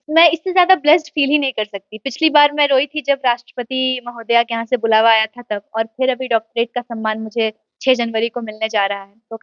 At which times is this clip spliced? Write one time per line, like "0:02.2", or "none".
none